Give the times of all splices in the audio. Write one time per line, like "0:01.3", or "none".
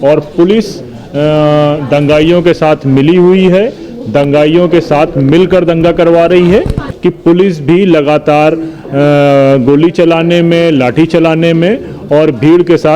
0:06.8